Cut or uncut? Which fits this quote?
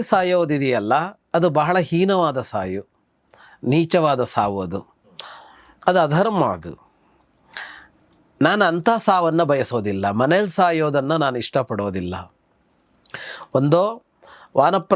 uncut